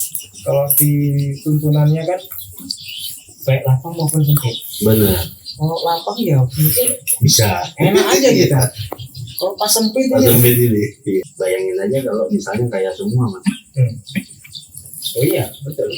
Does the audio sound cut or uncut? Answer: cut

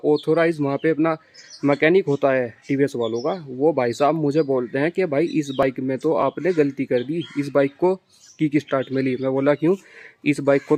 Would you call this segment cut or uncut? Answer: uncut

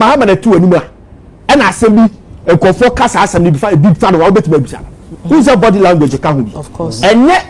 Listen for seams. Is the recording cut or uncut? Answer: cut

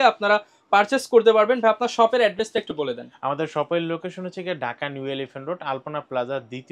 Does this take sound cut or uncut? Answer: uncut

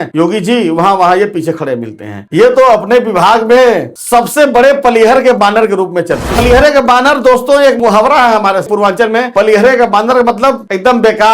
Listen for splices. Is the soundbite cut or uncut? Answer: cut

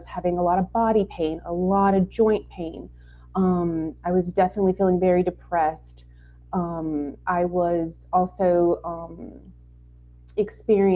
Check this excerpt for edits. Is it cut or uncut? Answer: uncut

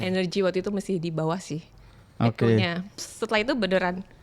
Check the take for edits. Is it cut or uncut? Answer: cut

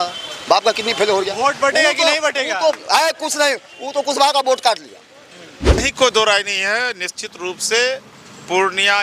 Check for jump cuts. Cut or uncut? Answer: cut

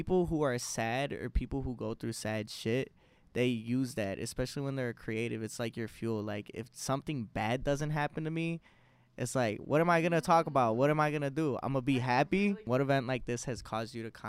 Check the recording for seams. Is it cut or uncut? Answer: uncut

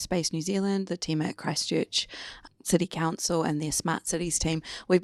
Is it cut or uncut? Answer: uncut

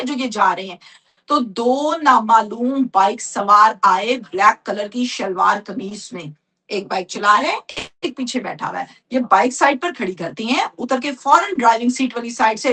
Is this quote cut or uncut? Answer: uncut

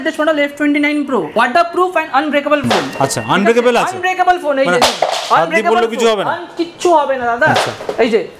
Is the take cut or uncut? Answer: cut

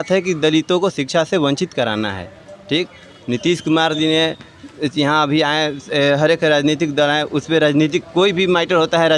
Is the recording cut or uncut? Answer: uncut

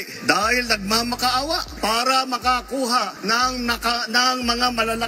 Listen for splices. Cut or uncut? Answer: uncut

